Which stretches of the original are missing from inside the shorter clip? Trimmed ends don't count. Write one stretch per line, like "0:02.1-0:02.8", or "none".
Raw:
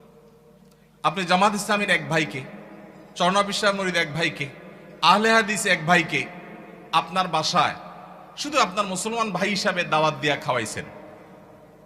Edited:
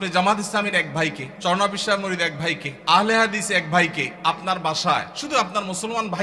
0:02.4-0:03.0
0:04.4-0:04.8
0:06.3-0:06.8
0:07.8-0:08.4